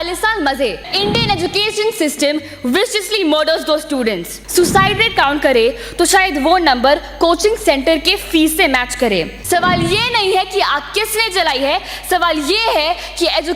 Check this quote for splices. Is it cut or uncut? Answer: cut